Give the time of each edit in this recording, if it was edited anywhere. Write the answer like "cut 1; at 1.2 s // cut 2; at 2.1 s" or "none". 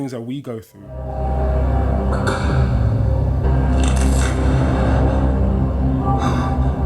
cut 1; at 3.4 s